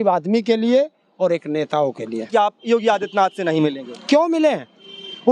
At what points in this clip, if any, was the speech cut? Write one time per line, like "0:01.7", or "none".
0:02.3